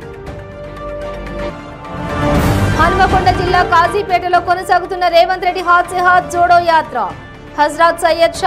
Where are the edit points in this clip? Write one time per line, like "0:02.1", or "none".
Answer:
0:01.0